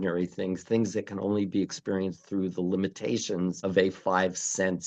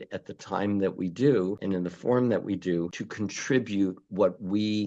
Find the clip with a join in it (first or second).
second